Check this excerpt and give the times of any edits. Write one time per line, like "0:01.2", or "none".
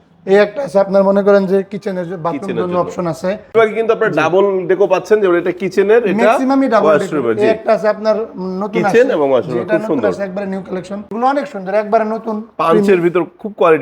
0:03.5
0:11.1

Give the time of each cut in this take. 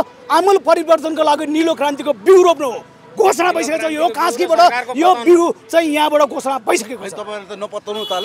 none

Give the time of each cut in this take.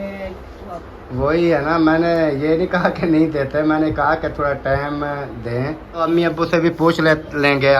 0:00.9
0:06.0

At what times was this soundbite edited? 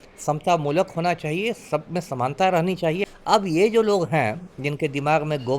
0:03.1

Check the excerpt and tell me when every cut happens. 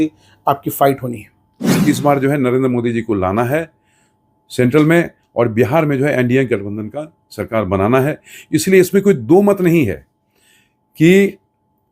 0:01.6

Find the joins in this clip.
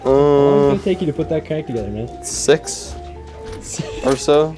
none

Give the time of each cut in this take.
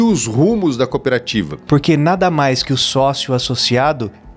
0:01.6

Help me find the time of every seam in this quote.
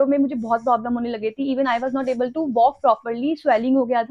none

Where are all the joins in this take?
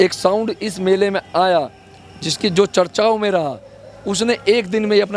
none

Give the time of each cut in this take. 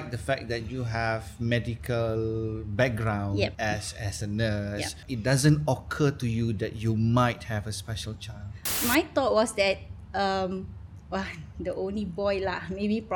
0:03.5
0:05.0
0:08.6

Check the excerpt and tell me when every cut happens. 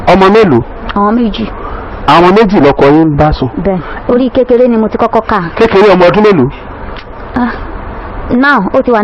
0:03.9

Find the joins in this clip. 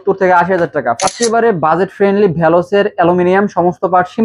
0:01.0

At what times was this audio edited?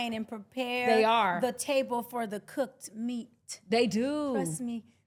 none

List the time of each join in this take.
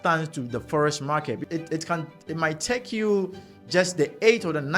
0:01.4

